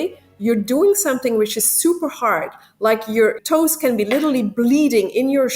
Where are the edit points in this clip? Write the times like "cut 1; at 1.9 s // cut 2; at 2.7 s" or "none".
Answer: cut 1; at 3.4 s